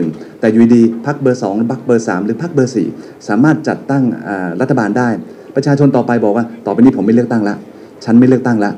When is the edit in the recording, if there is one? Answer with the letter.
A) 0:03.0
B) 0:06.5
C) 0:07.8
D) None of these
D